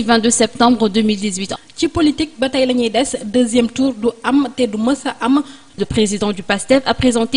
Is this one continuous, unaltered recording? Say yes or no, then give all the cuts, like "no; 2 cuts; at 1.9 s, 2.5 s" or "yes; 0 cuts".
no; 2 cuts; at 1.4 s, 5.8 s